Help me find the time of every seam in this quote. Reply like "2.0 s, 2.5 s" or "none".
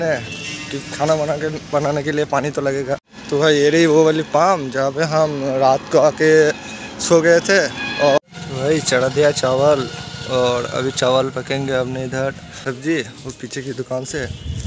3.1 s, 8.2 s, 12.6 s